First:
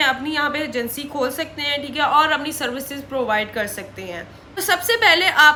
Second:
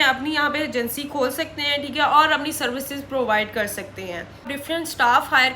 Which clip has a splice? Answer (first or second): second